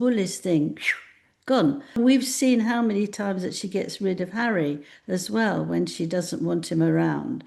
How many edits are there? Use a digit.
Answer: 1